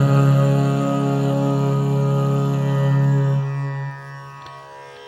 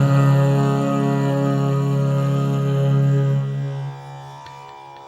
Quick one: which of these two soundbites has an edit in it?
second; 1 cut; at 4.2 s

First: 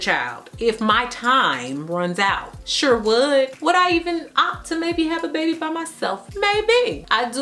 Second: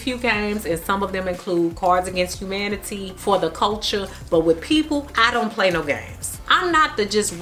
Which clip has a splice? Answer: first; 2 cuts; at 3.5 s, 6.2 s

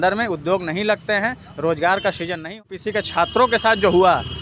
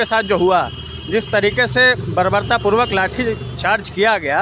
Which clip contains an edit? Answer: first; 1 cut; at 2.6 s

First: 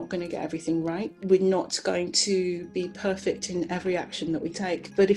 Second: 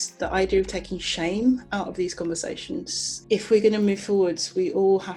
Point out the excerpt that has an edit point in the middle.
second; 1 cut; at 3.2 s

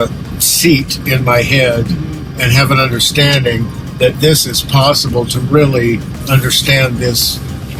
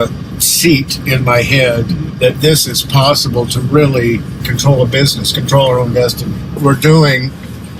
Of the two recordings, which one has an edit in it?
second; 3 cuts; at 2.1 s, 4.3 s, 6.6 s

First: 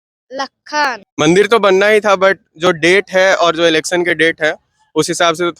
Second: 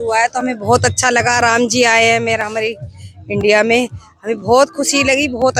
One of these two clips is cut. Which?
first; 1 cut; at 1.0 s

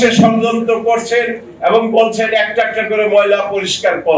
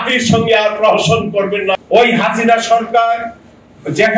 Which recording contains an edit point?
second; 1 cut; at 1.7 s

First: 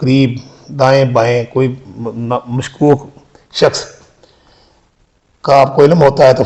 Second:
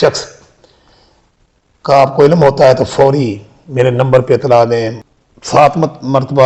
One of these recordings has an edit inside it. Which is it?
second; 1 cut; at 5.0 s

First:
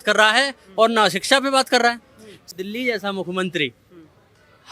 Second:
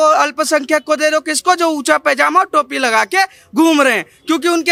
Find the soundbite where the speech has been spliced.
first; 1 cut; at 2.5 s

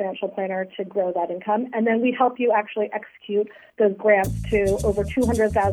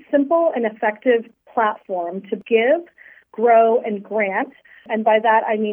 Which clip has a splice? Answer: second; 2 cuts; at 2.3 s, 4.9 s

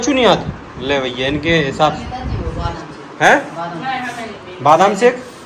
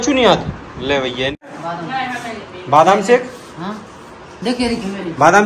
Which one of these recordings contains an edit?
second; 1 cut; at 1.5 s

